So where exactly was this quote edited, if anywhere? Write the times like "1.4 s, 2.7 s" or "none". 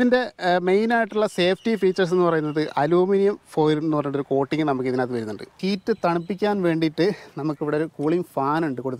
5.6 s